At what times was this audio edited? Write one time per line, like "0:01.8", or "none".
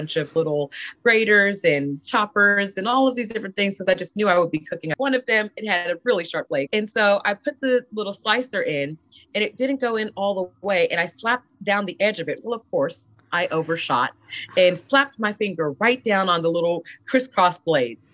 0:04.9
0:06.7